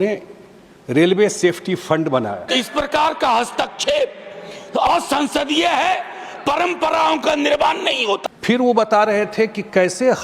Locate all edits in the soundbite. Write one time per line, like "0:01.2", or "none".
0:02.4
0:08.2